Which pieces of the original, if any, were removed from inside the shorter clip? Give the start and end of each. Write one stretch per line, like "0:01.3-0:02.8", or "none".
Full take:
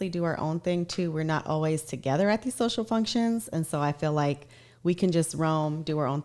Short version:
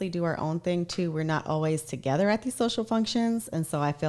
none